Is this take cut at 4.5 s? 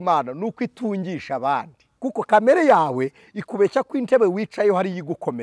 no; 1 cut; at 1.8 s

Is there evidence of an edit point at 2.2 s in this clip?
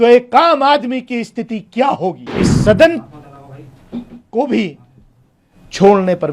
yes; 1 cut; at 2.2 s

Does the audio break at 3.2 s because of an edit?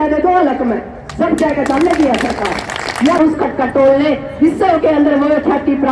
yes; 1 cut; at 3.2 s

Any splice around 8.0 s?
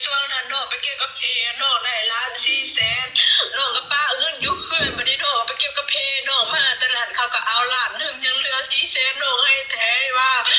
no; 0 cuts

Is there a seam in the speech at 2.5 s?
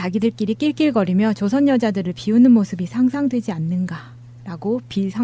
yes; 1 cut; at 2.5 s

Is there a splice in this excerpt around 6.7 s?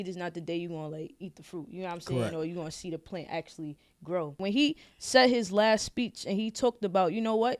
no; 1 cut; at 4.4 s

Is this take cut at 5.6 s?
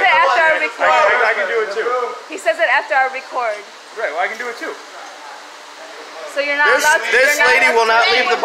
yes; 1 cut; at 5.6 s

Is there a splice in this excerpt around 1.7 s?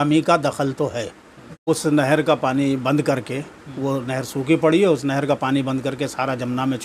yes; 1 cut; at 1.7 s

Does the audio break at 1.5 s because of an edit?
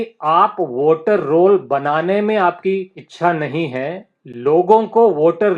no; 1 cut; at 3.0 s

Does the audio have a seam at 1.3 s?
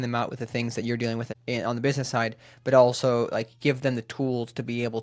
yes; 1 cut; at 1.3 s

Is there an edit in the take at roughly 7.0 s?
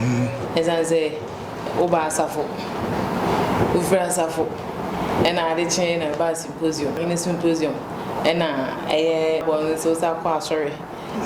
yes; 2 cuts; at 7.0 s, 9.4 s

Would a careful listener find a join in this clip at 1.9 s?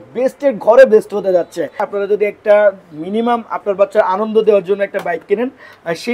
yes; 1 cut; at 1.9 s

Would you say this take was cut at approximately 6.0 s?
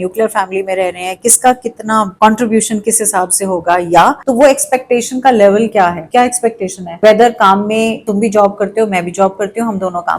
no; 1 cut; at 4.2 s

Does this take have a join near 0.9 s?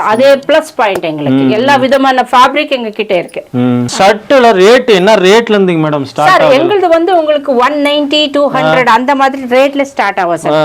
no; 1 cut; at 3.9 s

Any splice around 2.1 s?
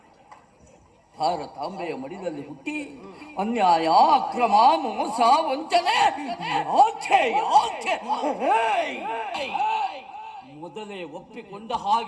no; 1 cut; at 9.4 s

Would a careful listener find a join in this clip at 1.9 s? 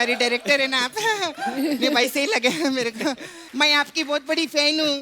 no; 1 cut; at 3.3 s

